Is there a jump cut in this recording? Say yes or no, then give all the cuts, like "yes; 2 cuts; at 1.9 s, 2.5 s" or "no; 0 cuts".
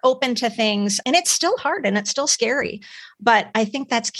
no; 0 cuts